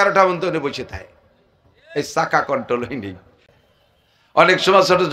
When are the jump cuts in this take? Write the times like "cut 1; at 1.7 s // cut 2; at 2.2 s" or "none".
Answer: cut 1; at 3.4 s